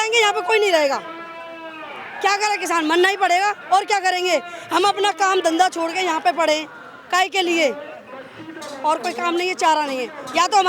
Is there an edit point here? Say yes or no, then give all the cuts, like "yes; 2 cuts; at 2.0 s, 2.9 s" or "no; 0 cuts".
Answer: no; 0 cuts